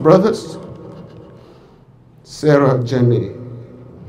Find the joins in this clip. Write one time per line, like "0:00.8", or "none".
0:01.5